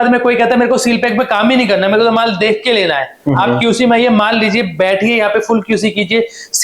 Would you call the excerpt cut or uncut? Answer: uncut